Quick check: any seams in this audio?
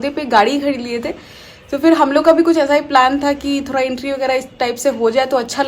no; 0 cuts

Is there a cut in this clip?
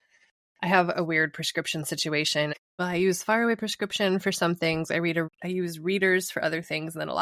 yes; 2 cuts; at 2.5 s, 5.4 s

